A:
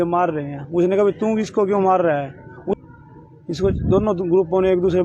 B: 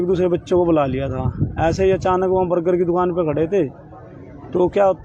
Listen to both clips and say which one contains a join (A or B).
A